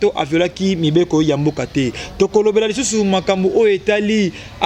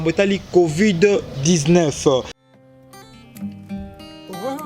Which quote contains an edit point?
second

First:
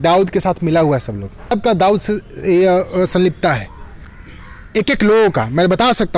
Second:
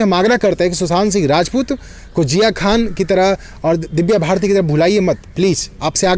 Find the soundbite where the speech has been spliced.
first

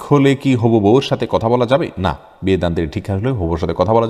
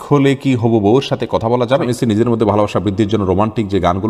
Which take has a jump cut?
second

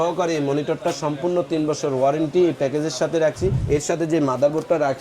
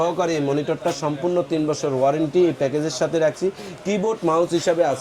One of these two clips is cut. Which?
first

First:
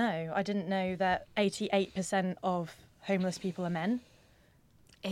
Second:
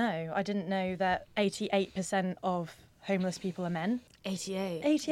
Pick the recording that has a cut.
second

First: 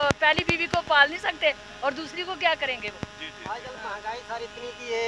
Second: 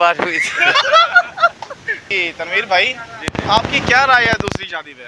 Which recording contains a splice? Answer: second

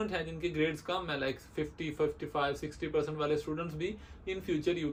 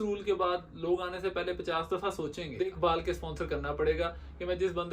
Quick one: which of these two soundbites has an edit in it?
second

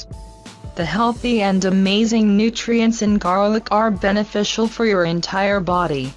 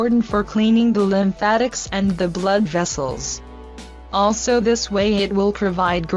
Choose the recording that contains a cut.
first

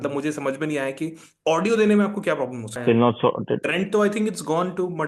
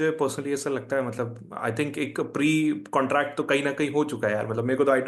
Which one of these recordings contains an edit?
first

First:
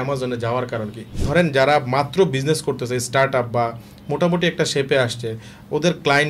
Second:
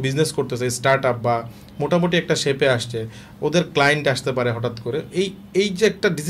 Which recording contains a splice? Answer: first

